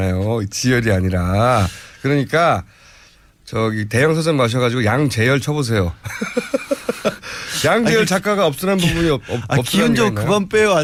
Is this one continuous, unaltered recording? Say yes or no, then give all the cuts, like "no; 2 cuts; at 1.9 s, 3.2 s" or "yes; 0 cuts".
yes; 0 cuts